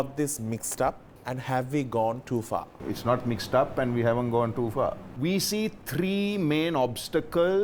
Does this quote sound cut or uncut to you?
cut